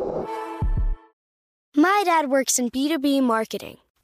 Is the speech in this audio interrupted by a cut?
yes; 1 cut; at 1.3 s

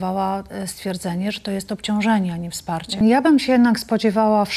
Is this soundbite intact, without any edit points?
no; 1 cut; at 3.0 s

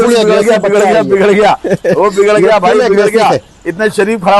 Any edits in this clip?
no; 0 cuts

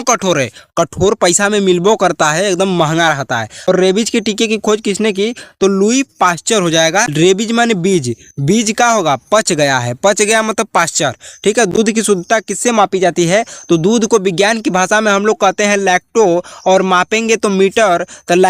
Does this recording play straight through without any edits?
no; 2 cuts; at 3.7 s, 7.1 s

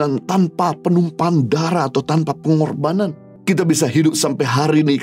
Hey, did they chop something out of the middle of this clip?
no; 0 cuts

